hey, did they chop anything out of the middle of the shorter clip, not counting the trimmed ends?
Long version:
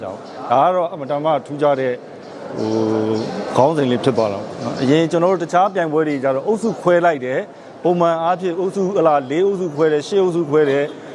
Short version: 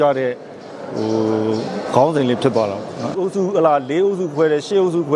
yes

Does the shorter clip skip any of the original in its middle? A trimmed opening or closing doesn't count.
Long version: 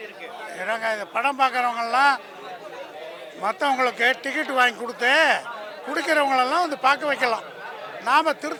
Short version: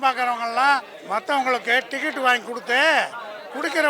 yes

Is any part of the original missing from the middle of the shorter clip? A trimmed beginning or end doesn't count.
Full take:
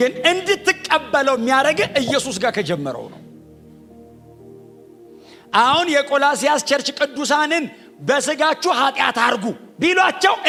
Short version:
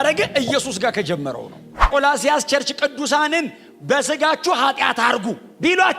yes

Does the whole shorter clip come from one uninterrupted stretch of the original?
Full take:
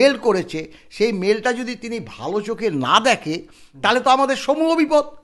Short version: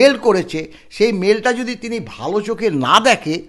yes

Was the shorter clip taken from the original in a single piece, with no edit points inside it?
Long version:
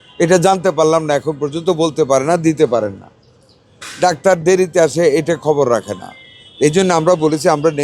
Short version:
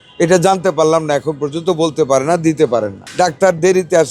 no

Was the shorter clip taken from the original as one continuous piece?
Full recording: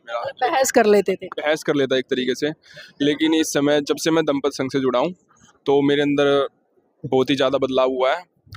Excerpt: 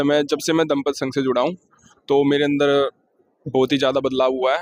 yes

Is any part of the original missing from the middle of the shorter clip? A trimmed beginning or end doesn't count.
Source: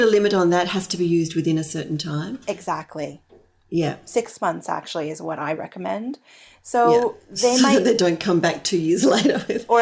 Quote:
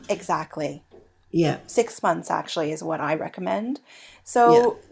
no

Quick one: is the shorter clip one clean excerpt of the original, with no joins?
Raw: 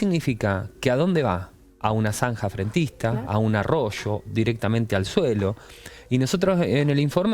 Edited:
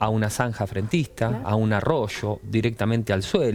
yes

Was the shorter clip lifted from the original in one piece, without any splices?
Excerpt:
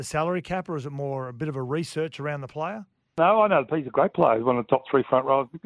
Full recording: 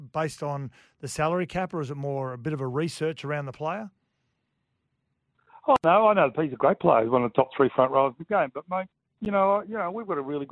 no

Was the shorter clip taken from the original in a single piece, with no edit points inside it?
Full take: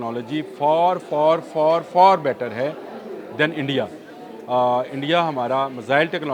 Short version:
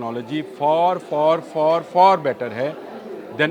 yes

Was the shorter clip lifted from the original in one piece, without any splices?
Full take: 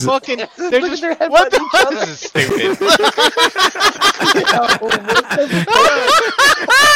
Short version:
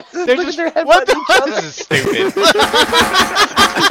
yes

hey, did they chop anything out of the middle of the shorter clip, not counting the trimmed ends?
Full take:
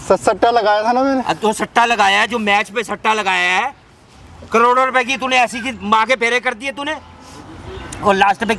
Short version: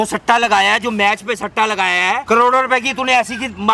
yes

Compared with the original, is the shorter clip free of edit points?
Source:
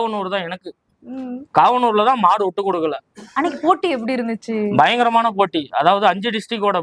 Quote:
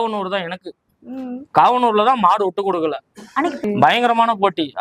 no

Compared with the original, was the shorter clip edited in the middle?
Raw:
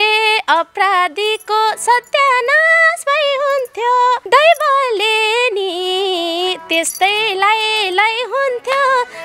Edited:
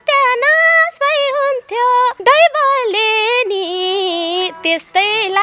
no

